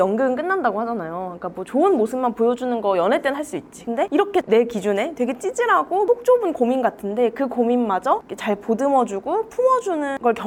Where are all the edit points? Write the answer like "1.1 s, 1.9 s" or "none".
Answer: none